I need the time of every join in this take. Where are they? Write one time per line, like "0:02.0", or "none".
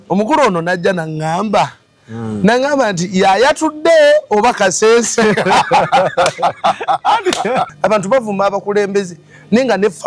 0:07.7